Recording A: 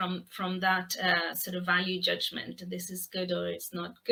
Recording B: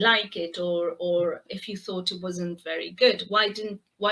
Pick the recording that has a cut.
B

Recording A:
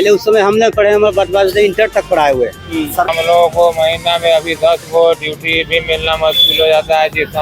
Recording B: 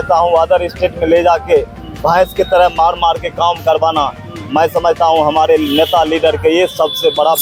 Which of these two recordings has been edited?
A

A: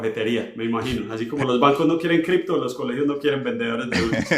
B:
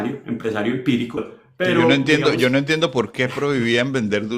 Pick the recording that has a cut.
B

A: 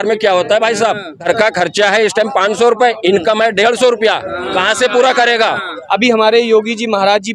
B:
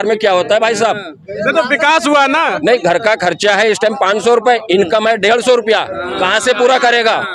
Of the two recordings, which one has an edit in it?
A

